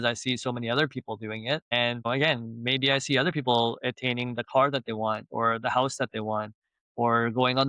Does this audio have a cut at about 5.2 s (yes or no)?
no